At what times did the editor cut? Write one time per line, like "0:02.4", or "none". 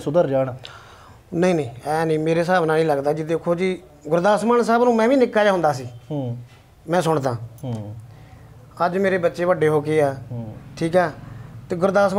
none